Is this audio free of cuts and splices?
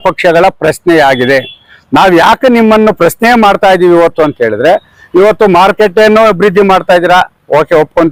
yes; 0 cuts

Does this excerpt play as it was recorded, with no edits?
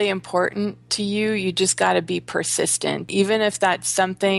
no; 1 cut; at 3.1 s

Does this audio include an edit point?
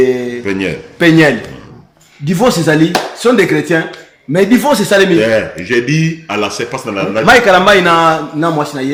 no; 0 cuts

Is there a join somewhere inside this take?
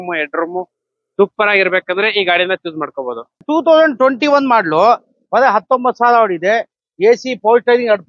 yes; 1 cut; at 3.4 s

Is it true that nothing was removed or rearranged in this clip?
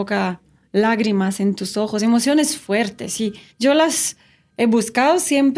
no; 1 cut; at 3.4 s

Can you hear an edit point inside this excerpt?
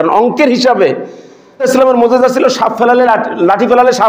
yes; 1 cut; at 1.6 s

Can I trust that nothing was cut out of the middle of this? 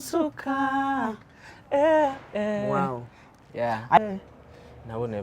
no; 1 cut; at 4.0 s

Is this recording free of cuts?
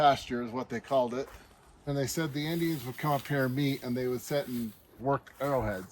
no; 2 cuts; at 1.9 s, 5.0 s

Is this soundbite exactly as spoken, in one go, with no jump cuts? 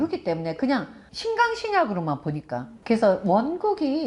no; 1 cut; at 2.6 s

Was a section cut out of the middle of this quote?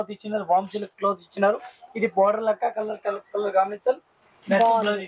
no; 0 cuts

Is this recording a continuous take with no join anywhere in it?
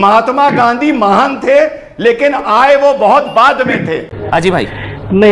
no; 1 cut; at 4.1 s

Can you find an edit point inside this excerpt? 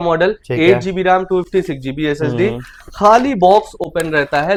no; 0 cuts

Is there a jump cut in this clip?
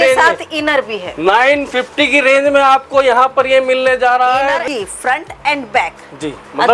yes; 1 cut; at 4.6 s

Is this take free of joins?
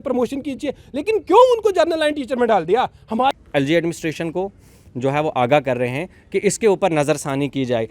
no; 1 cut; at 3.3 s

